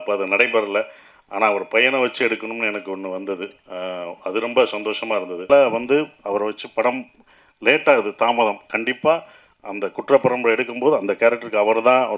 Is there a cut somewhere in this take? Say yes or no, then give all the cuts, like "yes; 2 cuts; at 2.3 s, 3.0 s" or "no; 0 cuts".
yes; 1 cut; at 5.5 s